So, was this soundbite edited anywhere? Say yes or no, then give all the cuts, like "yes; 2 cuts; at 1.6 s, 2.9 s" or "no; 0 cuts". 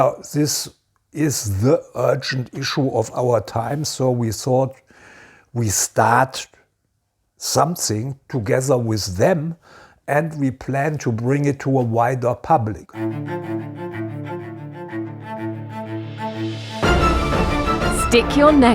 yes; 1 cut; at 13.1 s